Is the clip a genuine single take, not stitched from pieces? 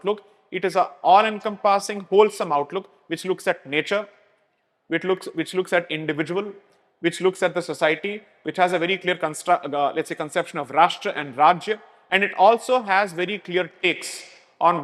yes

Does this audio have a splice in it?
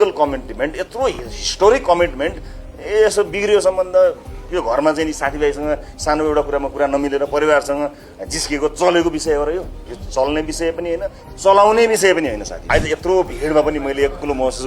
yes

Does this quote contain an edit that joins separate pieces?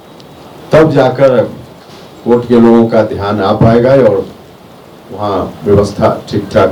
no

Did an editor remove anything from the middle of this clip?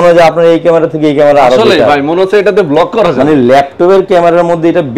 no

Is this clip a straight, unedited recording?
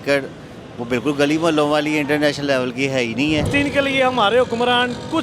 no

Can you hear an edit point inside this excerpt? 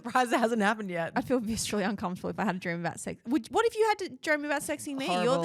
no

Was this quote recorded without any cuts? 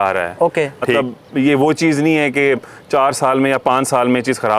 no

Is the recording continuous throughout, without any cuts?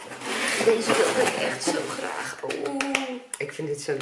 yes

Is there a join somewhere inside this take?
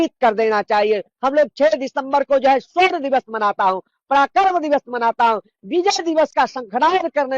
yes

